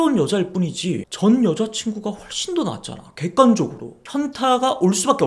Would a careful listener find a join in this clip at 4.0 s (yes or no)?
yes